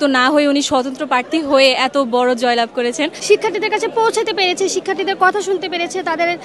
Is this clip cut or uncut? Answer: cut